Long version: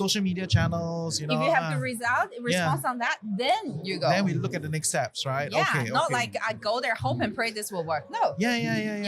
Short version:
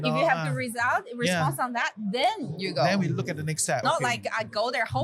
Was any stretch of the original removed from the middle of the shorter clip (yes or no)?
yes